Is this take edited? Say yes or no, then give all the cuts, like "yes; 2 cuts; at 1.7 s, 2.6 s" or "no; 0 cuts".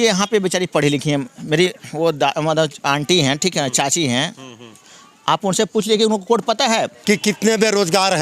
yes; 1 cut; at 6.9 s